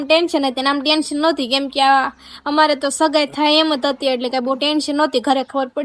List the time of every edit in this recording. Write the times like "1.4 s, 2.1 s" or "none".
none